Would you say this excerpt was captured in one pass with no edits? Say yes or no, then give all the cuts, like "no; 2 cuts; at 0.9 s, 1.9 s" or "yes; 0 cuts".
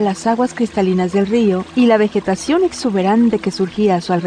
no; 1 cut; at 1.7 s